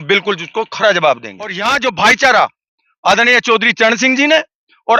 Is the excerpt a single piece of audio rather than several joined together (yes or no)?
no